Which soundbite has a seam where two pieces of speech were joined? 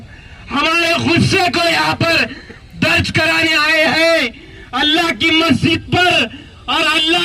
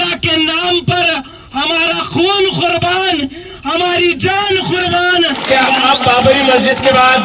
second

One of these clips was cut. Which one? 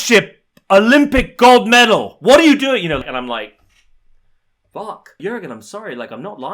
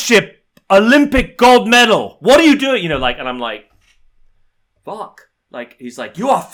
first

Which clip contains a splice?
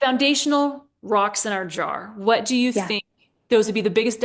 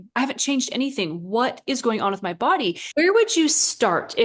second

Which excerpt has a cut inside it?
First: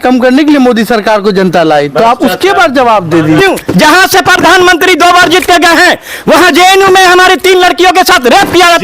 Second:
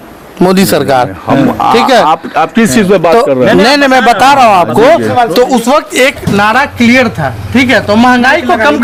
first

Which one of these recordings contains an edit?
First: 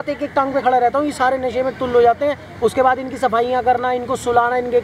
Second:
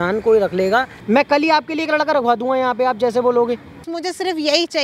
second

